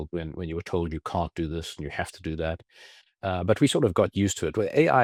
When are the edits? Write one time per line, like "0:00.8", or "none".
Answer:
none